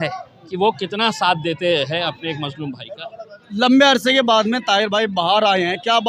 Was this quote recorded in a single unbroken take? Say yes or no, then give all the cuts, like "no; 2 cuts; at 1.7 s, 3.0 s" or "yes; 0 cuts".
yes; 0 cuts